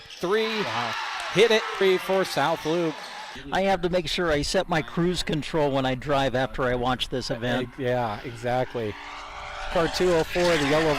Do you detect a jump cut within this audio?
yes; 1 cut; at 1.8 s

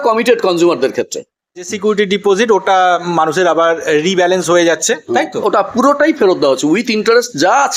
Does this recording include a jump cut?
yes; 1 cut; at 1.7 s

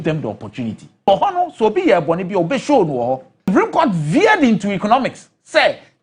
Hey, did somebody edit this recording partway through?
yes; 2 cuts; at 1.1 s, 3.5 s

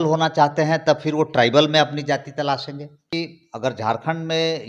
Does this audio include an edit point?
yes; 1 cut; at 3.1 s

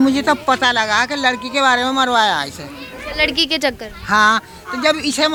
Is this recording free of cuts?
yes; 0 cuts

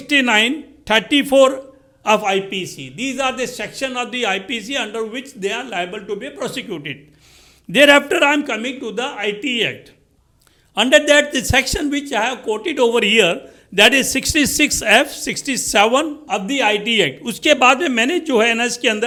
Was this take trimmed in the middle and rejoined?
no; 0 cuts

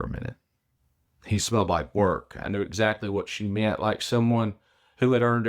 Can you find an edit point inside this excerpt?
no; 0 cuts

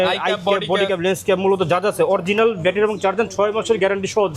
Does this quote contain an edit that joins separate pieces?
no; 0 cuts

